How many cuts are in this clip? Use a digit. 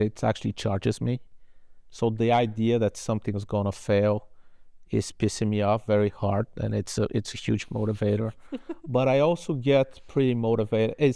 0